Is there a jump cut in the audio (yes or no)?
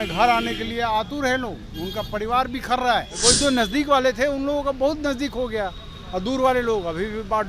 yes